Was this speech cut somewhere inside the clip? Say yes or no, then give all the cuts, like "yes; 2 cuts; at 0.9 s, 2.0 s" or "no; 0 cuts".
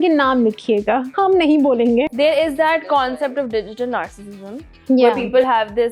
yes; 2 cuts; at 1.1 s, 2.1 s